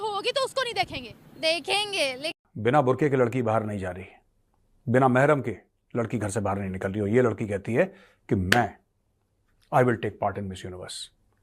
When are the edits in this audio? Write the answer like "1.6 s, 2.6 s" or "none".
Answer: 2.4 s